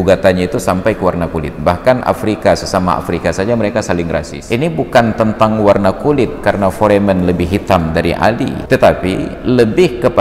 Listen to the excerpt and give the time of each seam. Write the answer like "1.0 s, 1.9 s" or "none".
4.3 s, 8.6 s